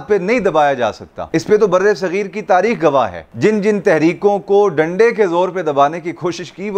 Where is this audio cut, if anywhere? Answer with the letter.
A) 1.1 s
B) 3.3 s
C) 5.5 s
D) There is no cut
A